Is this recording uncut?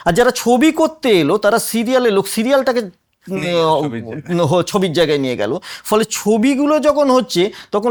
yes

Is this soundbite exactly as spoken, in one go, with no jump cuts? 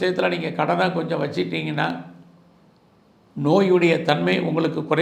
yes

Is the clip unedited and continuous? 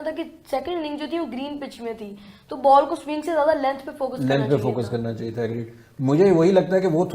yes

